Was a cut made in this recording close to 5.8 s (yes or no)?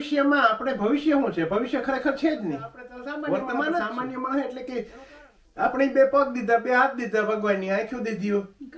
no